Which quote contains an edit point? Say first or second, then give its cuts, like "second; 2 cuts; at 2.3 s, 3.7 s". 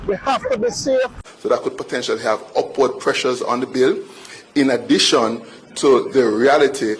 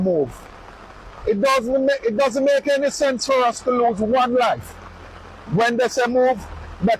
first; 1 cut; at 1.3 s